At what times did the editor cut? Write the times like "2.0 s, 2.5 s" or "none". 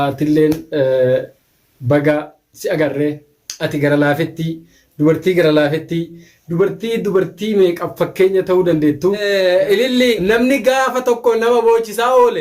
9.2 s, 10.2 s